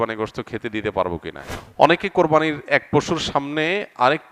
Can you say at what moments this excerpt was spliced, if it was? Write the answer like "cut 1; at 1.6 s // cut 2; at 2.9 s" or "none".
cut 1; at 1.4 s